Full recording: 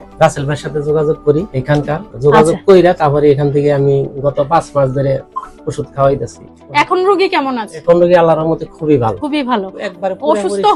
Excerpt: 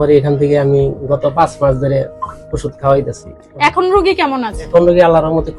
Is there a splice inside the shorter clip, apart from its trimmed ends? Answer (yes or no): no